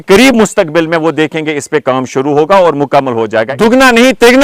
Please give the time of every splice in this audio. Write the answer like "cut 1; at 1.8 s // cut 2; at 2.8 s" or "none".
cut 1; at 3.4 s